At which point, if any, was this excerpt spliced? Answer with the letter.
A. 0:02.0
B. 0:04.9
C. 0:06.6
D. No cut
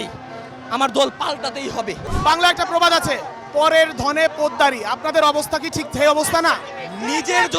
A